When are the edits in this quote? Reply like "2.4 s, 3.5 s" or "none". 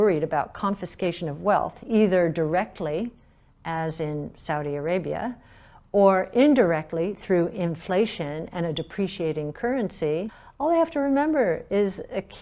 10.4 s